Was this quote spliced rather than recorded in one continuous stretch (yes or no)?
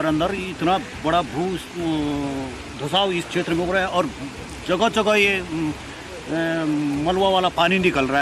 no